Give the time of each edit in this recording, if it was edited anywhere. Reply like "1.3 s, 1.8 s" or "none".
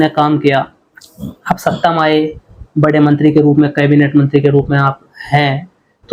none

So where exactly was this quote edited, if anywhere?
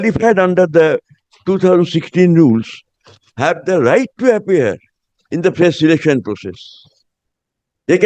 none

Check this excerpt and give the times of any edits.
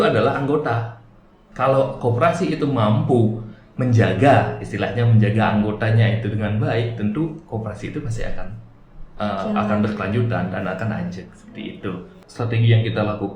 12.3 s

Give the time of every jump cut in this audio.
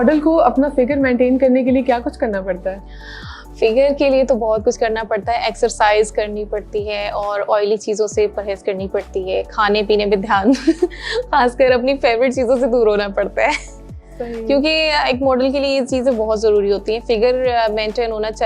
none

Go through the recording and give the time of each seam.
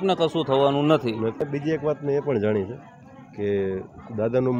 1.4 s

